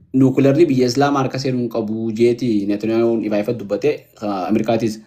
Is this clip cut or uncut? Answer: uncut